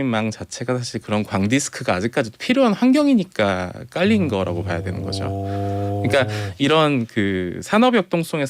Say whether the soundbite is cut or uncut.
uncut